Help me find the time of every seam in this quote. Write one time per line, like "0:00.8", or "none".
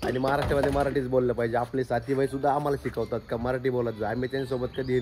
none